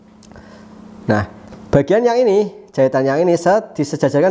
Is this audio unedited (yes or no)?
yes